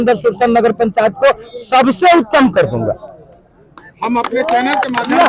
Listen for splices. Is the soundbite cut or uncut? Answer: uncut